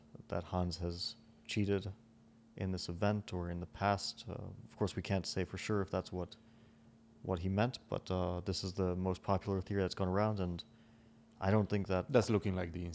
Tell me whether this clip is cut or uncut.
uncut